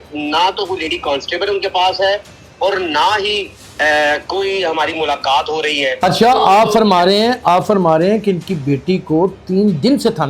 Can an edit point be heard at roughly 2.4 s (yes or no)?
no